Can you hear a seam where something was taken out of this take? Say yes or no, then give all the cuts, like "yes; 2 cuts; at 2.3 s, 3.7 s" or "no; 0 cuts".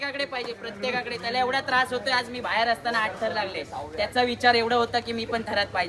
no; 0 cuts